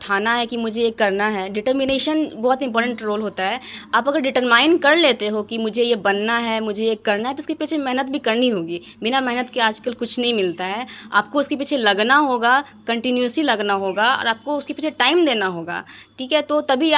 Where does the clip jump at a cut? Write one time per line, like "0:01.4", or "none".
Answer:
none